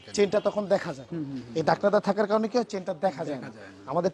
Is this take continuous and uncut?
yes; 0 cuts

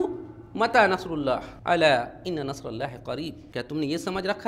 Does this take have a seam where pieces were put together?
yes; 2 cuts; at 1.5 s, 3.4 s

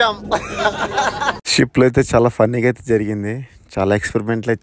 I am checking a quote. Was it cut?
yes; 1 cut; at 1.4 s

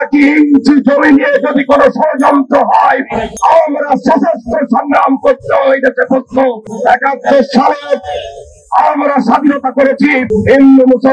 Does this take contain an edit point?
no; 0 cuts

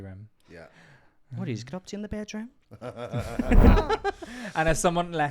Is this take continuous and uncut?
no; 1 cut; at 3.7 s

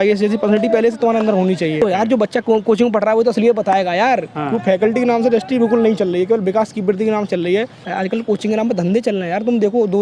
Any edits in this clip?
yes; 3 cuts; at 1.8 s, 4.3 s, 7.8 s

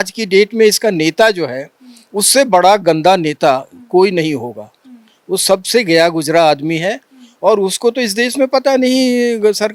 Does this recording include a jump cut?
no; 0 cuts

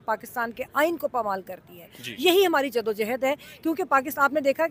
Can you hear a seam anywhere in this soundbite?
no; 0 cuts

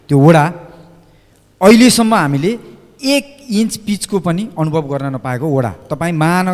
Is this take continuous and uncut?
yes; 0 cuts

